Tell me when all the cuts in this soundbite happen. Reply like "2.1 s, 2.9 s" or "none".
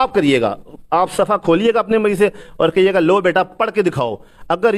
none